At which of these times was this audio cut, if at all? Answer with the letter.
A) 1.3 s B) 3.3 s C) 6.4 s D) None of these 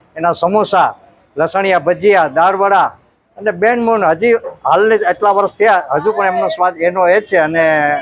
D